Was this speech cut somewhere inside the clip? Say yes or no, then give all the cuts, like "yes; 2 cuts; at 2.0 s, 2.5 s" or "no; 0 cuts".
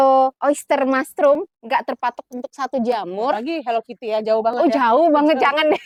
no; 0 cuts